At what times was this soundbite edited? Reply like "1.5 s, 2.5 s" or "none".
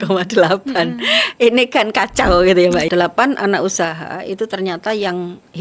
2.9 s